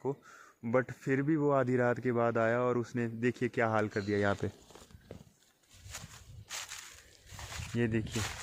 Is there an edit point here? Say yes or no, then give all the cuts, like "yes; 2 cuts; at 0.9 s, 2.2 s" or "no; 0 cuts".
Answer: no; 0 cuts